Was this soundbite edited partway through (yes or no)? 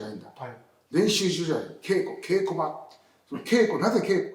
no